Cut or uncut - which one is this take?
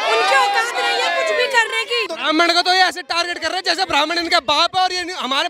cut